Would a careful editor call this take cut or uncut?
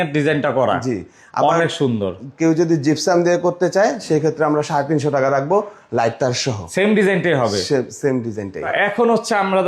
uncut